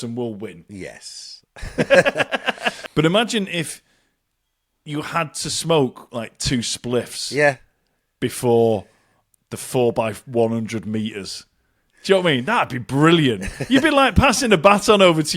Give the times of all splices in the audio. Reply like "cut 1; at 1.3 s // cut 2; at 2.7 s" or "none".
cut 1; at 2.7 s